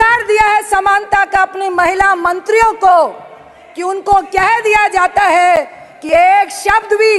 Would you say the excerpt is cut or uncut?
uncut